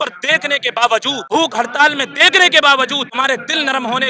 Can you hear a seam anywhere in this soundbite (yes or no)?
yes